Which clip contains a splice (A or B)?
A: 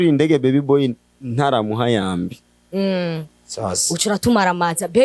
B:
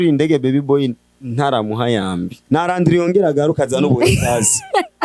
B